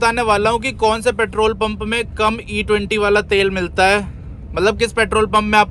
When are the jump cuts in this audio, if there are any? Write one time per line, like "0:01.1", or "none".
none

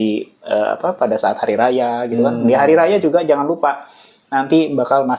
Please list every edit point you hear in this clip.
none

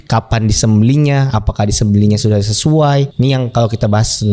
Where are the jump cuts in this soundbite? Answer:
0:03.1

